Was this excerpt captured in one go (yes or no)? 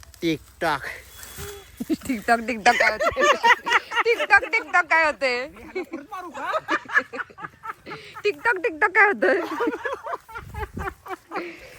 yes